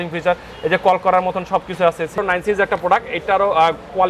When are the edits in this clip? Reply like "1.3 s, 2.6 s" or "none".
2.2 s